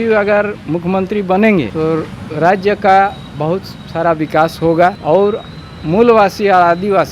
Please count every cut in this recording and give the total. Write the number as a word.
two